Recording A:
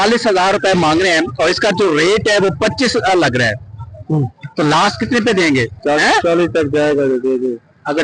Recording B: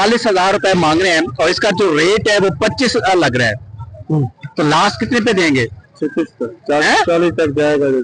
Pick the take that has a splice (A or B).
A